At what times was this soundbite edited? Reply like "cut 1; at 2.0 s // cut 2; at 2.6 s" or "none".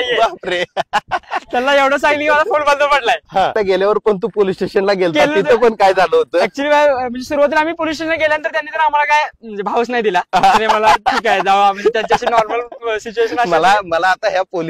cut 1; at 3.5 s